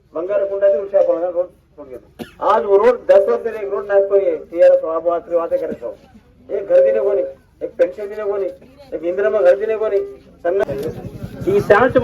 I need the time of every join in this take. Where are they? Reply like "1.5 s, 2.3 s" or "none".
none